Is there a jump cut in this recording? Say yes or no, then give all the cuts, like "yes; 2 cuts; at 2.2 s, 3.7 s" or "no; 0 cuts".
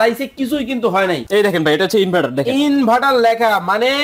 yes; 1 cut; at 1.2 s